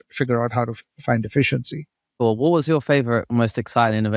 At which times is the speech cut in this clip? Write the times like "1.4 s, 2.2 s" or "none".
2.1 s, 3.3 s